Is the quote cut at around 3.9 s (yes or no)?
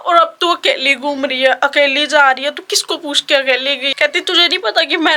yes